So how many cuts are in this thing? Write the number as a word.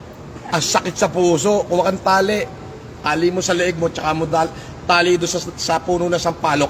zero